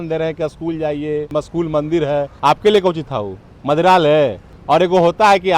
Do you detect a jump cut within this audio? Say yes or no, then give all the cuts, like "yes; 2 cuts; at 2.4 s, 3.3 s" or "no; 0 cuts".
yes; 3 cuts; at 1.3 s, 2.3 s, 4.5 s